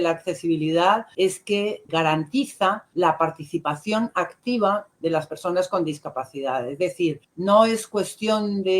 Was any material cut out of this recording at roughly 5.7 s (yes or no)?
no